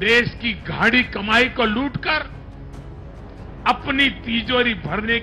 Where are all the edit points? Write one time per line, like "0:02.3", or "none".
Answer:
none